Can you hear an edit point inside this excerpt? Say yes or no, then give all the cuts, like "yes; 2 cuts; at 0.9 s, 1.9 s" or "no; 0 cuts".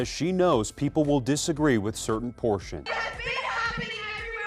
yes; 1 cut; at 2.8 s